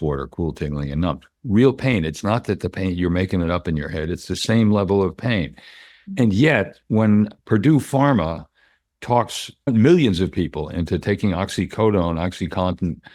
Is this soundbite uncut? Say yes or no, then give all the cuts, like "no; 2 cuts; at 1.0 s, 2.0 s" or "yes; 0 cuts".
yes; 0 cuts